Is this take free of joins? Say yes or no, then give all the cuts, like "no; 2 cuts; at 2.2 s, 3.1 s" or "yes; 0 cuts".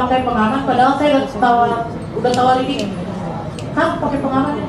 yes; 0 cuts